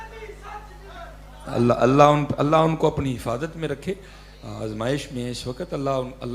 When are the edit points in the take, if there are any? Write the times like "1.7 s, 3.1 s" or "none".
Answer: none

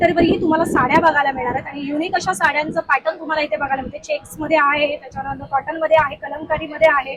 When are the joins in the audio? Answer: none

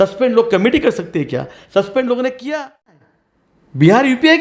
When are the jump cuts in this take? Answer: 3.1 s

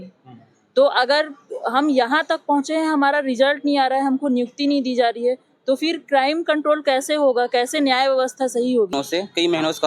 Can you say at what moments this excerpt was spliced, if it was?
8.9 s

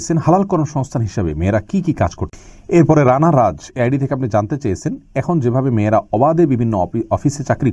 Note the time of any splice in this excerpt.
2.3 s

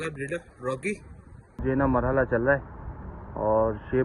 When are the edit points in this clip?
1.6 s

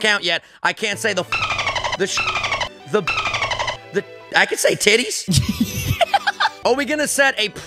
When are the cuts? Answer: 5.1 s, 6.6 s

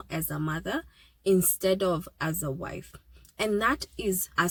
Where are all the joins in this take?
none

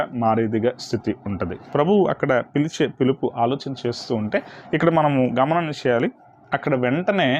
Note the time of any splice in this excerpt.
none

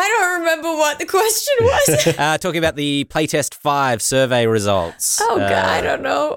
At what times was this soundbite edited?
2.2 s

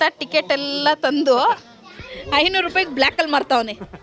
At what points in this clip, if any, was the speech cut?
none

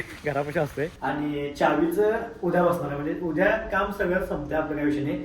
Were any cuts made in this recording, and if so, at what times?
1.0 s

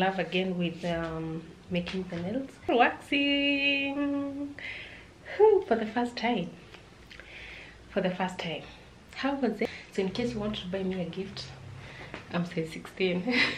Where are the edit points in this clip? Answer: 2.6 s, 9.6 s

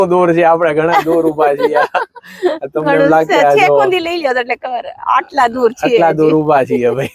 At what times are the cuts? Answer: none

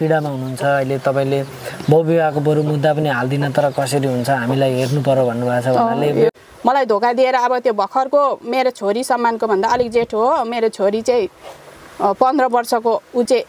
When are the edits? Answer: 6.3 s

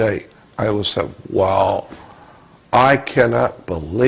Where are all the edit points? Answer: 2.1 s

